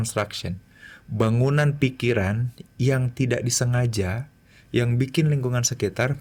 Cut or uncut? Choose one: uncut